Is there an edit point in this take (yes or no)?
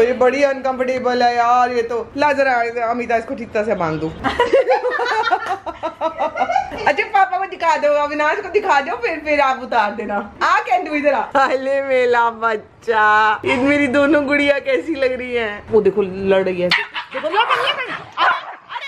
no